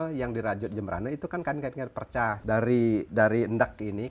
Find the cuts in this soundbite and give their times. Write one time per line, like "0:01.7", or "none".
0:02.4